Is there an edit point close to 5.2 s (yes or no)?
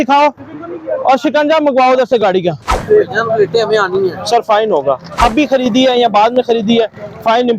yes